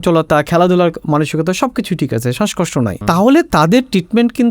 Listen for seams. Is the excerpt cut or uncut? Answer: cut